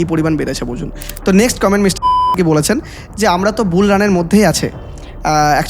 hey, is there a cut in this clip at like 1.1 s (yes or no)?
yes